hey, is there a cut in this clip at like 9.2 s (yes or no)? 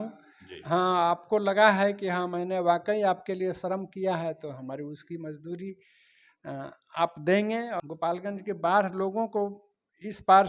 no